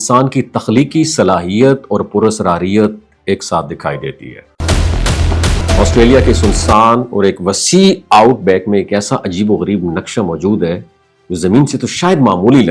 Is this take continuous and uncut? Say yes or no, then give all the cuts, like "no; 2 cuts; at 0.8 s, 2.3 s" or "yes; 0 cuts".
no; 1 cut; at 5.5 s